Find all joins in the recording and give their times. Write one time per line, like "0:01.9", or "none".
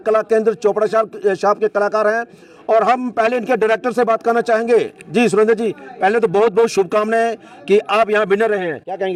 none